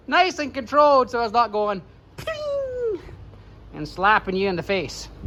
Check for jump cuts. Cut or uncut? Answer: uncut